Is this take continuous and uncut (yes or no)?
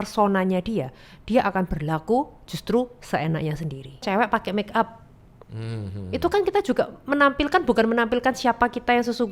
no